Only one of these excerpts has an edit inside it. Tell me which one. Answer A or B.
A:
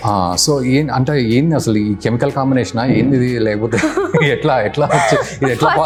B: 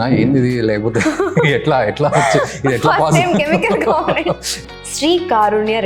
B